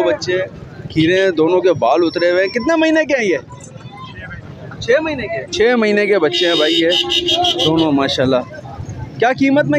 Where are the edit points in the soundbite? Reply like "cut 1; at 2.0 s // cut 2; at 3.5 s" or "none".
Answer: none